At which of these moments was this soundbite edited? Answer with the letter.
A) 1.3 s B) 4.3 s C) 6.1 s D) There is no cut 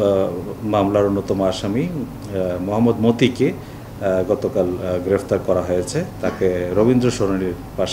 D